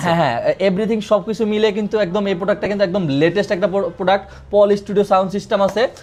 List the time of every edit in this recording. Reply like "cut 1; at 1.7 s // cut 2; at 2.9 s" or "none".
none

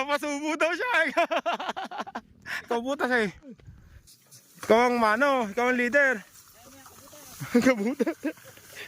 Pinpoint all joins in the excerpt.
cut 1; at 2.7 s

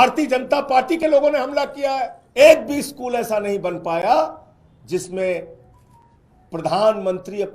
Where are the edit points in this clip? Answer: cut 1; at 2.2 s

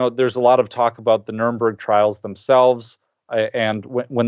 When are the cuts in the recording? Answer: none

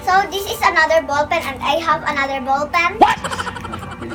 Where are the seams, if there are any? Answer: none

